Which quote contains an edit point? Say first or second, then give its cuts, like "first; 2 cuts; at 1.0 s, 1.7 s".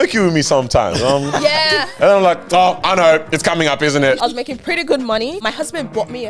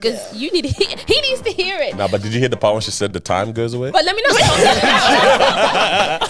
first; 2 cuts; at 4.2 s, 5.4 s